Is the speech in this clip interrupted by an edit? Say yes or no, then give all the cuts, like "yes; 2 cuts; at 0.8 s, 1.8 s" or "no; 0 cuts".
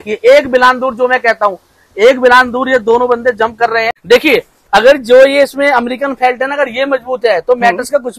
yes; 1 cut; at 3.9 s